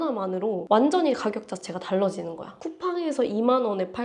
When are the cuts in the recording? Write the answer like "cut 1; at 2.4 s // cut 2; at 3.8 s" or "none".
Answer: cut 1; at 2.6 s